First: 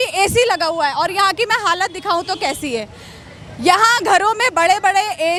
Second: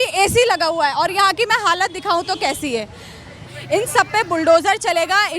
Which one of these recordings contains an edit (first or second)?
second